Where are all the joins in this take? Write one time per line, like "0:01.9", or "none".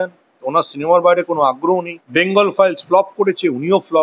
0:02.0